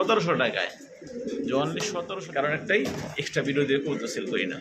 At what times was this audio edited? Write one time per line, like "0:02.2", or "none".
0:02.2